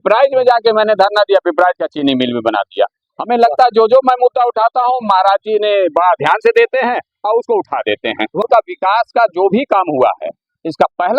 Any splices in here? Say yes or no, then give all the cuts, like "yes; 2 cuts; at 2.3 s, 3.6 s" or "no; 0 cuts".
yes; 1 cut; at 8.4 s